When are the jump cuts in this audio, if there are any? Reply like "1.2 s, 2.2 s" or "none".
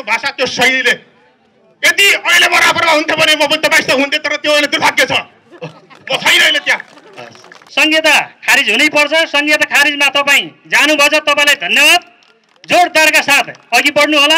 7.6 s